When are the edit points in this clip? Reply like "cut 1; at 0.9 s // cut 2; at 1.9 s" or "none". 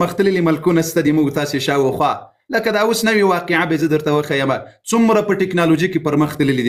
none